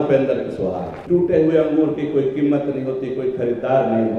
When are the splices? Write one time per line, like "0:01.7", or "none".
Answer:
0:00.9